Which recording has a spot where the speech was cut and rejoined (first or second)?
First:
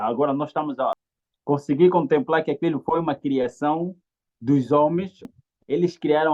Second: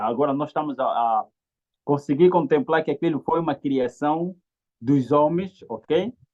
first